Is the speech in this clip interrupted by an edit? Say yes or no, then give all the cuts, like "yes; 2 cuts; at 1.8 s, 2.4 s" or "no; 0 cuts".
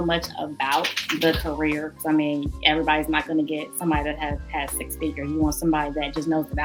no; 0 cuts